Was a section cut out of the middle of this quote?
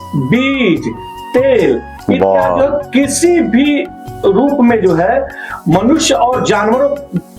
no; 0 cuts

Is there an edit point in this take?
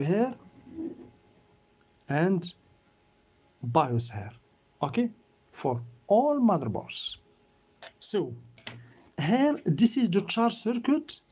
no; 0 cuts

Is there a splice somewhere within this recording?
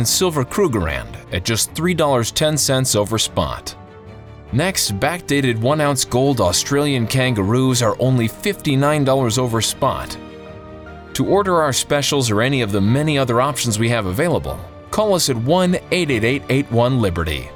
no; 0 cuts

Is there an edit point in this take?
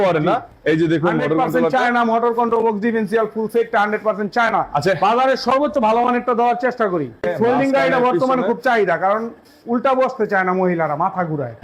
yes; 1 cut; at 7.2 s

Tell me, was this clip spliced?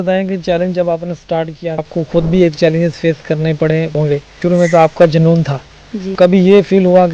yes; 3 cuts; at 1.9 s, 3.9 s, 6.1 s

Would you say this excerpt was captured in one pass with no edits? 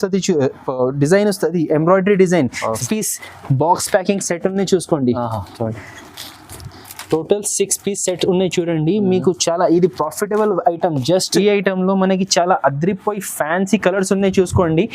no; 2 cuts; at 2.8 s, 11.3 s

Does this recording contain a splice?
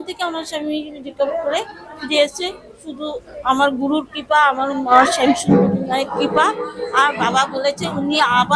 no; 0 cuts

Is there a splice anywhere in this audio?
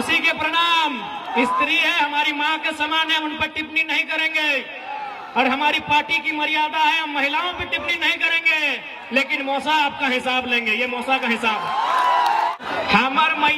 yes; 1 cut; at 12.5 s

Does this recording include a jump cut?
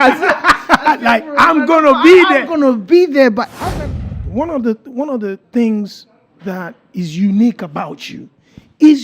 yes; 1 cut; at 4.2 s

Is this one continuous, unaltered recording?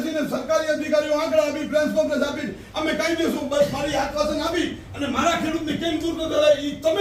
yes; 0 cuts

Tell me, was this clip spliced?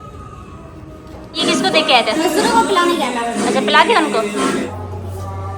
yes; 2 cuts; at 1.3 s, 4.7 s

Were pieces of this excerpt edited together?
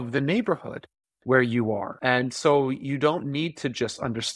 yes; 1 cut; at 1.9 s

